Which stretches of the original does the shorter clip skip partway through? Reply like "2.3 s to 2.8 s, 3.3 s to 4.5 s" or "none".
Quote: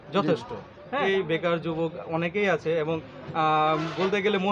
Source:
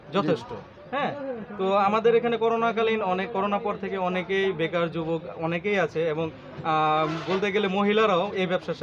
1.0 s to 4.3 s

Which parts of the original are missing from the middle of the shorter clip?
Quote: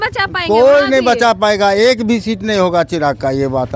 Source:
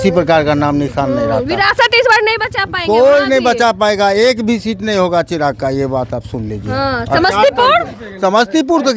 none

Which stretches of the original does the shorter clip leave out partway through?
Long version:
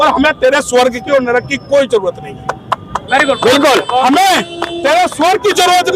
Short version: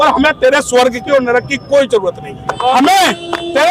2.6 s to 3.9 s

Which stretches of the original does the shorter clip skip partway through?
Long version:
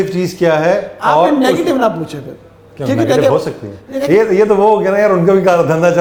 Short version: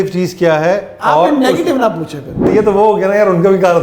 2.5 s to 4.3 s

